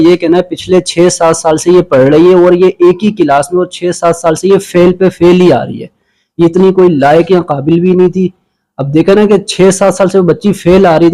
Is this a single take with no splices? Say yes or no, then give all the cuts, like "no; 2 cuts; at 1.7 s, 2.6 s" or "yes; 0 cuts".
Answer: yes; 0 cuts